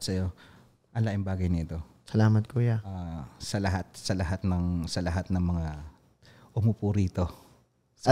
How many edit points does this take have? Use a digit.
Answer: 0